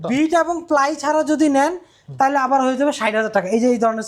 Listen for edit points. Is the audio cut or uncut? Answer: uncut